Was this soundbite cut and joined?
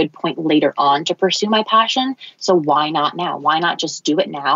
no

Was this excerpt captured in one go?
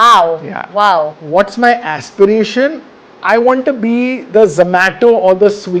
no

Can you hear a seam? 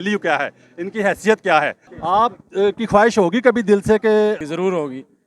yes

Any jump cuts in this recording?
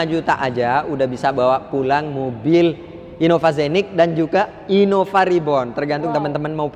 no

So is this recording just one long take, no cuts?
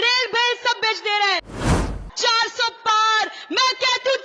no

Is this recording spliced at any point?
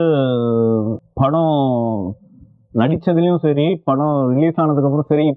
yes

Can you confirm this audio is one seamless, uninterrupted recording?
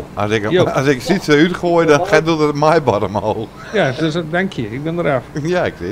yes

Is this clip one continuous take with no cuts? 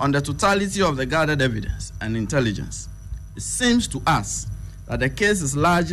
yes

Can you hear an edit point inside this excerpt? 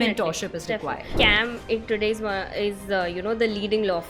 yes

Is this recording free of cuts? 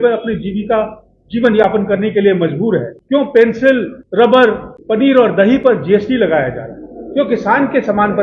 no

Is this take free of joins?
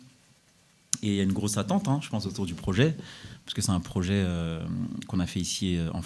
yes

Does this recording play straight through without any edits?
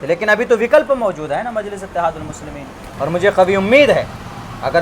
no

